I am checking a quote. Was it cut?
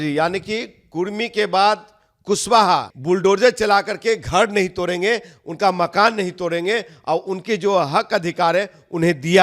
yes; 1 cut; at 2.9 s

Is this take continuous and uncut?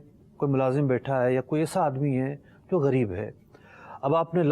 yes; 0 cuts

